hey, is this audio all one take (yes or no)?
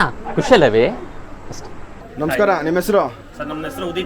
no